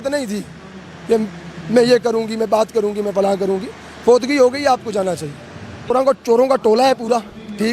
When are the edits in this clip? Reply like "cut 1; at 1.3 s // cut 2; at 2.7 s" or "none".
cut 1; at 5.9 s